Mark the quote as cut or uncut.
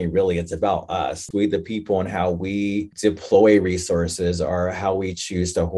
cut